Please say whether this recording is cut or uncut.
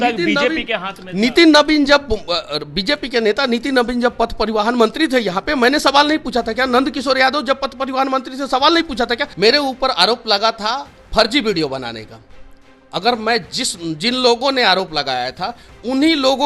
cut